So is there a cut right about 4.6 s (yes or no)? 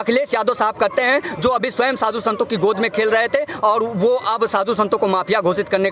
no